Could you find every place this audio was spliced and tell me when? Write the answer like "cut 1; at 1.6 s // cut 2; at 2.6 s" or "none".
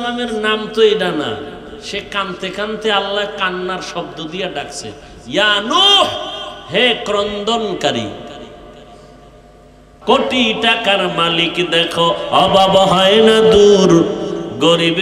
cut 1; at 9.9 s

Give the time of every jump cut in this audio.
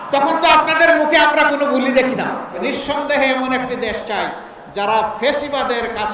cut 1; at 2.6 s

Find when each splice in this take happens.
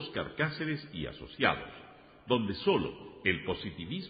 none

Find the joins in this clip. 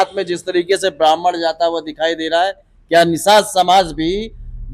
none

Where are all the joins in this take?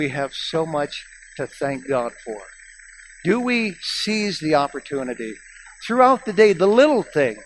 none

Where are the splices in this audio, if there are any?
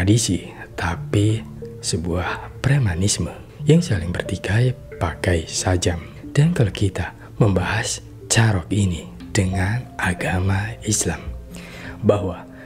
none

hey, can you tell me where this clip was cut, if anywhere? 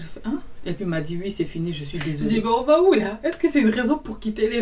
cut 1; at 2.2 s

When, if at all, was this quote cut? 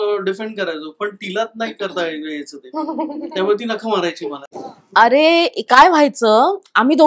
cut 1; at 4.5 s

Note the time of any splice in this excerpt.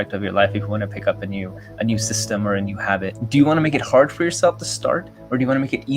cut 1; at 3.2 s

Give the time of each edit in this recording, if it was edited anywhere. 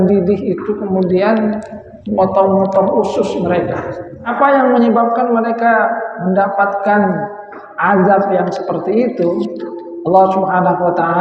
cut 1; at 4.3 s

